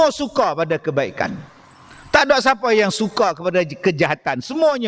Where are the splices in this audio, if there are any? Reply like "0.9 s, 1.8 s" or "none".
none